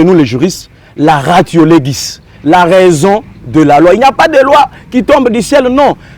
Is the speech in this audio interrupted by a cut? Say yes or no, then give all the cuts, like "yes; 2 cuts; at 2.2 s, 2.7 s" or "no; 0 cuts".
no; 0 cuts